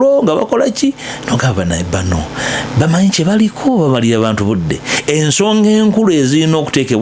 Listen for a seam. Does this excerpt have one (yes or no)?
no